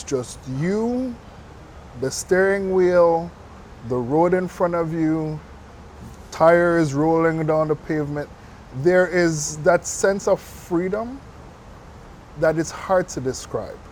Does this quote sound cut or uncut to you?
uncut